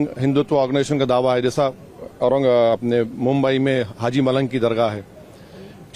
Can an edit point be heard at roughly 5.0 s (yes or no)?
no